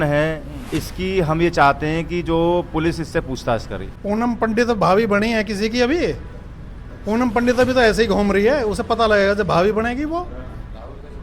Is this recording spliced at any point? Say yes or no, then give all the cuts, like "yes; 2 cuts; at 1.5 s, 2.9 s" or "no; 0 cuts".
yes; 1 cut; at 3.8 s